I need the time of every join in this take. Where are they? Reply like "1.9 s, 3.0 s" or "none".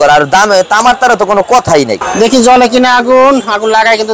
2.1 s